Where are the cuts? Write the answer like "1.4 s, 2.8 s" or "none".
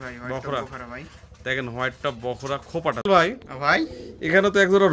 3.0 s